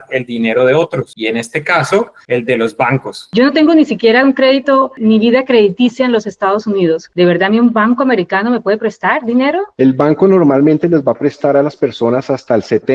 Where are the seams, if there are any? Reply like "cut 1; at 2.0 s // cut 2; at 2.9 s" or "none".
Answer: cut 1; at 1.1 s // cut 2; at 2.2 s // cut 3; at 3.3 s // cut 4; at 9.7 s